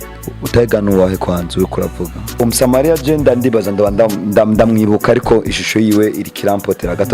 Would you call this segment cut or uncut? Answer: cut